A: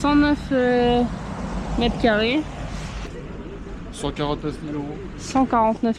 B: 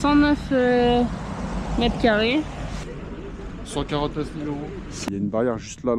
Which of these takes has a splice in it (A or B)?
B